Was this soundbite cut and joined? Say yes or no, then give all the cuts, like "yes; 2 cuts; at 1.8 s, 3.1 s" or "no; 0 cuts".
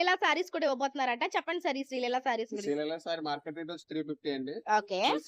no; 0 cuts